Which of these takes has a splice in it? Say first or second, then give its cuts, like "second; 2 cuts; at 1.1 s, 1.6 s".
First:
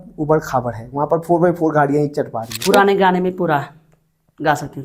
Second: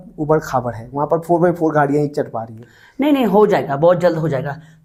first; 1 cut; at 2.5 s